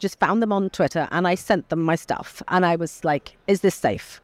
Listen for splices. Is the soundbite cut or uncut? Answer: uncut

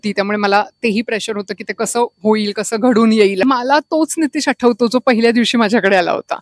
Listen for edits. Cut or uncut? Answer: cut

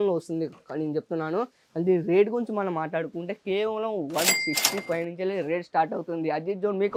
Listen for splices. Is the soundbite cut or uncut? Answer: uncut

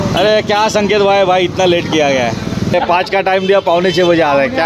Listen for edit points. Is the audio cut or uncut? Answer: cut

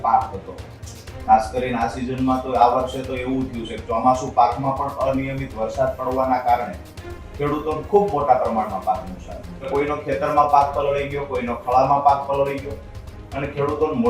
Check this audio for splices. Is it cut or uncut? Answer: cut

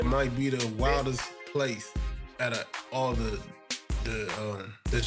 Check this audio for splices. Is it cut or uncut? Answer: uncut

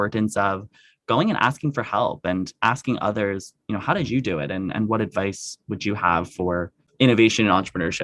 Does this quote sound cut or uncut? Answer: cut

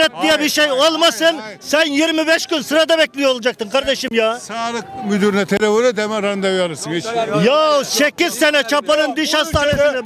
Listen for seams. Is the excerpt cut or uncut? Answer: uncut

